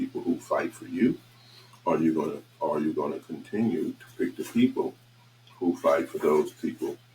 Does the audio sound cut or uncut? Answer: uncut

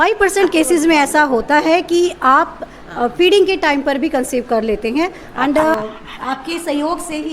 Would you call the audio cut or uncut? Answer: cut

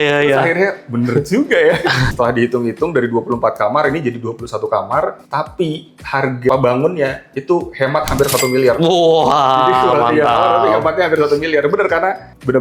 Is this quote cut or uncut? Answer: cut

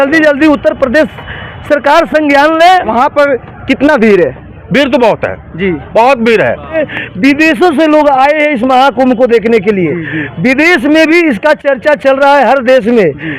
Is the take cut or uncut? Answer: cut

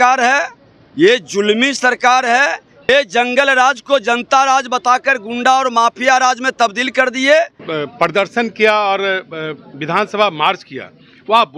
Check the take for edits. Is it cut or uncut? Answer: cut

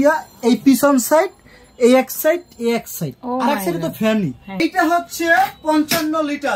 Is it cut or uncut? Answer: cut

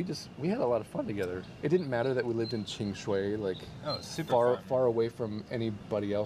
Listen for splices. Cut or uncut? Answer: uncut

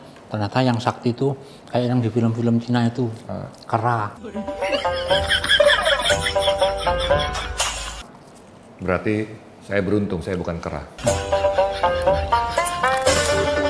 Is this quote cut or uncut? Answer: uncut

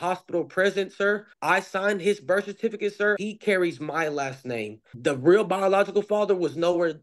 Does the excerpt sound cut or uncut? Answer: cut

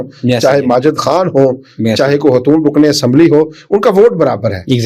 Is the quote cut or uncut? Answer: uncut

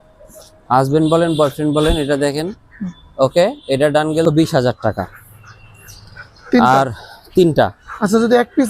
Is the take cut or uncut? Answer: cut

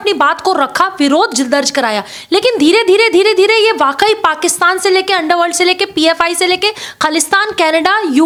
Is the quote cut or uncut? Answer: uncut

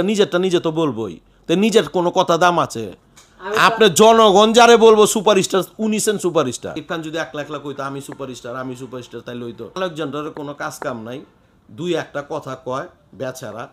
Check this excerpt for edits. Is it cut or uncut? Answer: cut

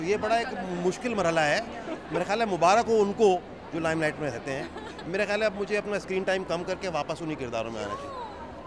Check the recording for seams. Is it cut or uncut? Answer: uncut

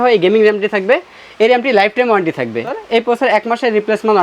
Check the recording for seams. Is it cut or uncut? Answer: cut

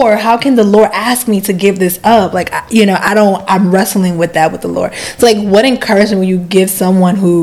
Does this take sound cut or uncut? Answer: uncut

